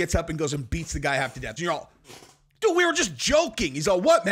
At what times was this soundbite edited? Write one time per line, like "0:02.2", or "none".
0:01.5